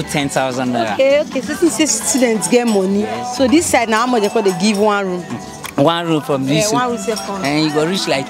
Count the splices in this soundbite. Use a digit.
0